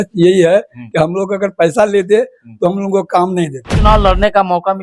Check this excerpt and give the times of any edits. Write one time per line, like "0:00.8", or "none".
0:03.8